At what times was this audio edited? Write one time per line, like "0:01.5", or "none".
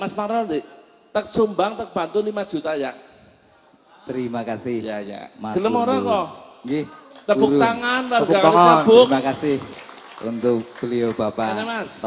none